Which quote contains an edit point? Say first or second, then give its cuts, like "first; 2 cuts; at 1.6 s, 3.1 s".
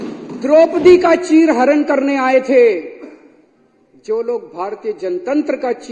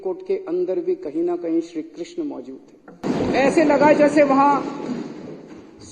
second; 1 cut; at 3.0 s